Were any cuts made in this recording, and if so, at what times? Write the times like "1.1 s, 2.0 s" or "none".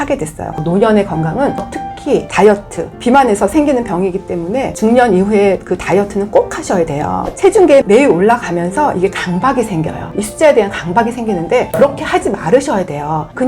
7.3 s

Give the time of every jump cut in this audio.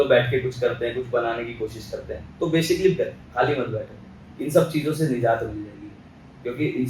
none

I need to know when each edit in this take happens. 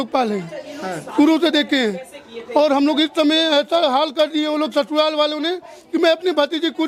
none

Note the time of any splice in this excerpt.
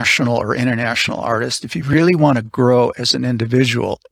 none

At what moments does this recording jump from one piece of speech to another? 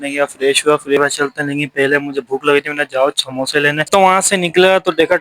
1.0 s, 3.8 s

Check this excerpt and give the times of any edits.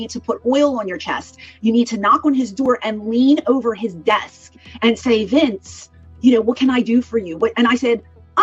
none

